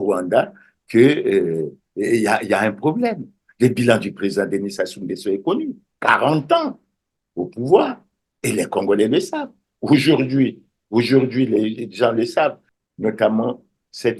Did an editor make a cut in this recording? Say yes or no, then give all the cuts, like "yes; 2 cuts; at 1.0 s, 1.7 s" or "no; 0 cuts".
yes; 1 cut; at 12.7 s